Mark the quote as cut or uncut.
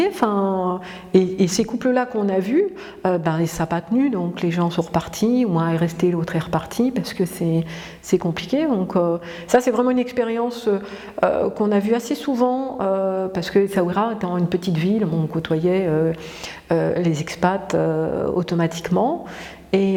uncut